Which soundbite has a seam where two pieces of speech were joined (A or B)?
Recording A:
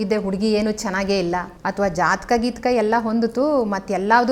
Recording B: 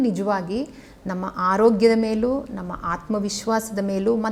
A